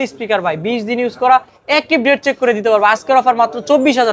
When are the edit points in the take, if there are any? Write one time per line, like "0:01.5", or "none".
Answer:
none